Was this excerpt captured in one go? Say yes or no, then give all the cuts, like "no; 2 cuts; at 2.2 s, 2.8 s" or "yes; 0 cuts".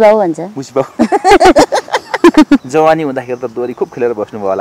no; 1 cut; at 2.7 s